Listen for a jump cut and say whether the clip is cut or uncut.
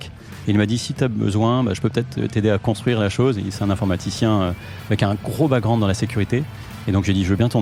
uncut